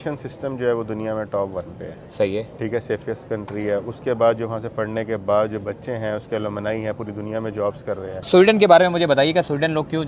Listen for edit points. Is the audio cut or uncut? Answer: cut